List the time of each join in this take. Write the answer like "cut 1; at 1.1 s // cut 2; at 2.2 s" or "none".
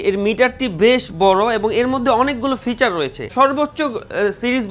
cut 1; at 3.2 s